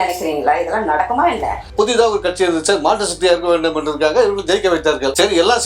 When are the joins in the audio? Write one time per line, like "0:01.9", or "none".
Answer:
0:01.7